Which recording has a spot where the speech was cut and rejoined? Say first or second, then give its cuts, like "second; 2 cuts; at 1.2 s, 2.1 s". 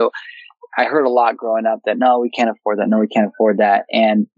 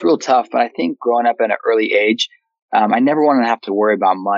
second; 1 cut; at 1.0 s